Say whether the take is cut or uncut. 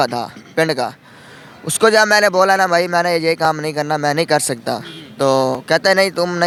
uncut